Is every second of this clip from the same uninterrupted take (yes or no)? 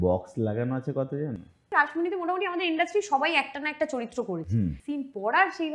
no